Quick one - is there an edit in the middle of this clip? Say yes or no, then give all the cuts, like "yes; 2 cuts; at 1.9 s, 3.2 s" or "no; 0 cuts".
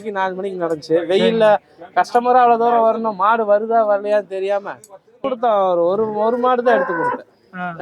yes; 1 cut; at 5.2 s